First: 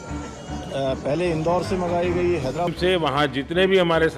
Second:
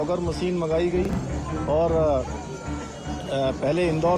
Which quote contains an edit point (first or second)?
first